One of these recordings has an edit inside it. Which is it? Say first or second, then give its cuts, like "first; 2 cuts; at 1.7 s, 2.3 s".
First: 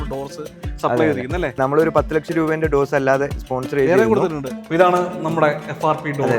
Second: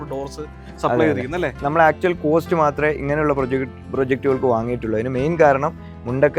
first; 2 cuts; at 1.5 s, 4.6 s